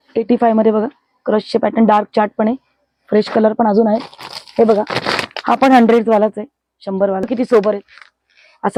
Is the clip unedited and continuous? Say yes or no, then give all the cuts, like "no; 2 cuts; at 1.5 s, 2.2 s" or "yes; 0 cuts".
yes; 0 cuts